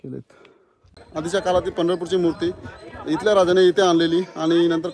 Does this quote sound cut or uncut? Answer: cut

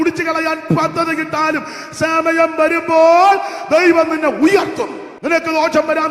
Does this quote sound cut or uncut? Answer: cut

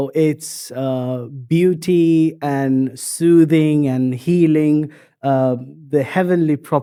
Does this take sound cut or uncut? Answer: uncut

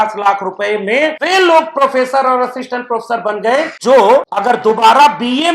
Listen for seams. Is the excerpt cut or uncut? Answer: cut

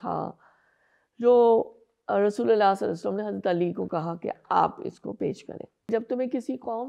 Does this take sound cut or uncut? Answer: cut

